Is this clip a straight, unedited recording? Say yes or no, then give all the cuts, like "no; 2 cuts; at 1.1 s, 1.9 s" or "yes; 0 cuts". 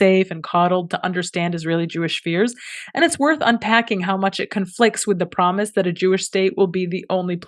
yes; 0 cuts